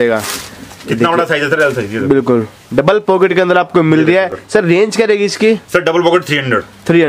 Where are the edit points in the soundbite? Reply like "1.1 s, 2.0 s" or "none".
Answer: none